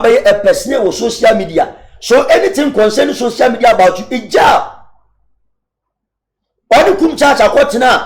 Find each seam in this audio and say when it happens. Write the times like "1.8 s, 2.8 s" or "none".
none